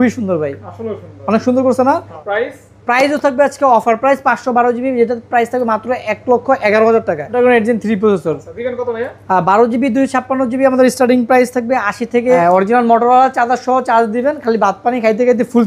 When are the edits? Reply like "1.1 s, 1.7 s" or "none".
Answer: 2.2 s, 7.4 s, 12.4 s